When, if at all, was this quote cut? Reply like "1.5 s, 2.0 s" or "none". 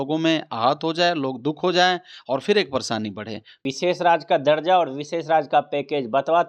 3.6 s